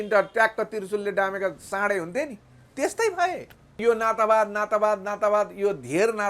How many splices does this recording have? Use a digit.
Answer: 1